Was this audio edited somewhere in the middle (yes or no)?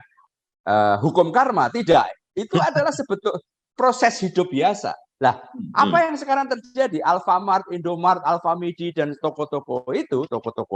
no